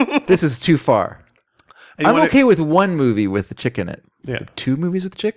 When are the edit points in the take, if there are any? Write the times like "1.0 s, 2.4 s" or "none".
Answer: 3.5 s